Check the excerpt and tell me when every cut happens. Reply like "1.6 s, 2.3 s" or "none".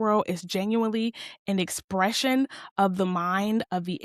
none

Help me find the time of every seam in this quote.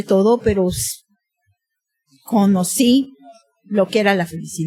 none

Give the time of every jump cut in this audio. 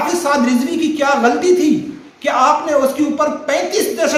none

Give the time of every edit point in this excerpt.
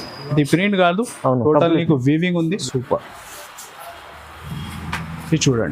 2.6 s

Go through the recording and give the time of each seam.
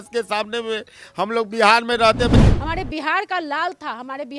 2.3 s

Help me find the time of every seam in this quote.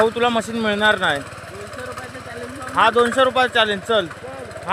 none

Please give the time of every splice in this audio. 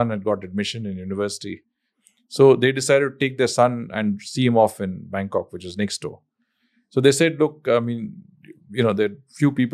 none

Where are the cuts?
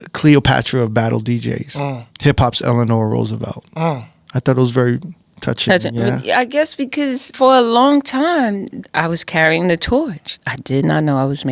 2.1 s, 7.3 s, 8.7 s, 10.3 s

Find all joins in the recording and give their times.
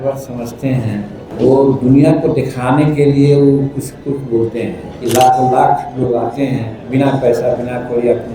1.3 s, 4.9 s

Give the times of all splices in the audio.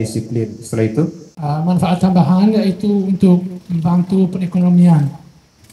1.3 s

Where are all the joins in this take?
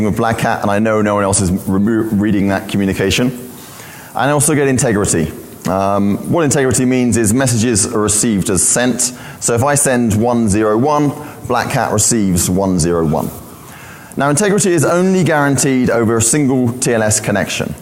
9.8 s

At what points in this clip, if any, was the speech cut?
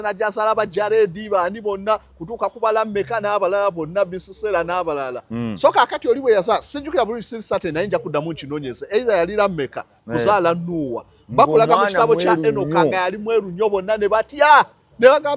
none

